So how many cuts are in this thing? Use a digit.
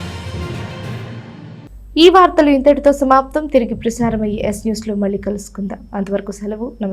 0